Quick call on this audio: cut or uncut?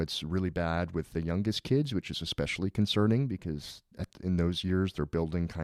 uncut